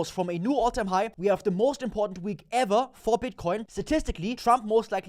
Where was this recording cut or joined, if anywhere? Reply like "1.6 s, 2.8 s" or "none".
1.1 s, 4.0 s